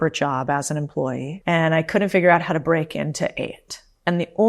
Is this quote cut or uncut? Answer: cut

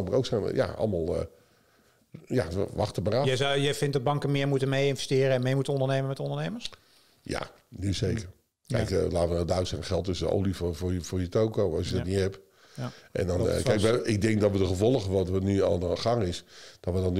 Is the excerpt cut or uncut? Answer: uncut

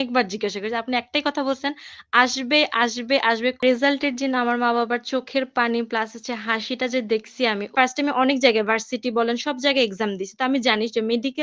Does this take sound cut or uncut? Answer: cut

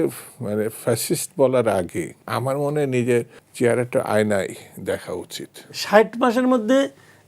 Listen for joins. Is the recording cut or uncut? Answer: cut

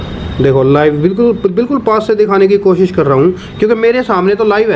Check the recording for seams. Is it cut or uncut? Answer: uncut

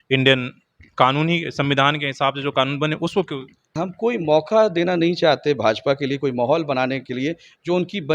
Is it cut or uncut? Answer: cut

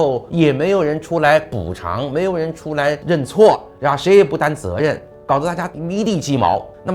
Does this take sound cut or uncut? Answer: uncut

